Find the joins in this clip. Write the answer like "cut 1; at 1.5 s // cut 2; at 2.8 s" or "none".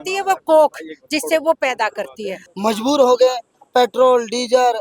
cut 1; at 2.4 s